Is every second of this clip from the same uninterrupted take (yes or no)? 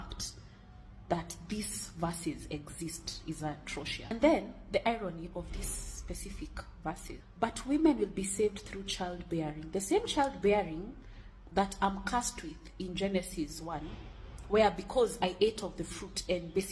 no